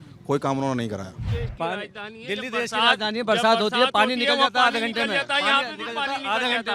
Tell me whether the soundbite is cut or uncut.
cut